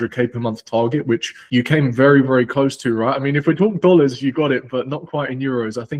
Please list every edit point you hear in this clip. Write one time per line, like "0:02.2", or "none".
none